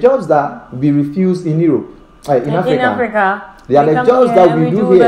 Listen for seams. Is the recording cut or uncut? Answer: uncut